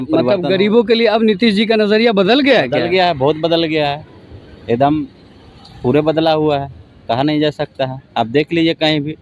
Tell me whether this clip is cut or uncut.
uncut